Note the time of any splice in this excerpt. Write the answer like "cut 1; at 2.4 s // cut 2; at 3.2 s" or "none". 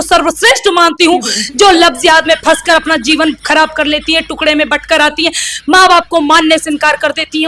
cut 1; at 1.4 s